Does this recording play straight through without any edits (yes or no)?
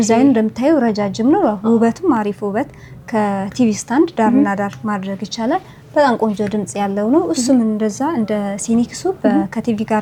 yes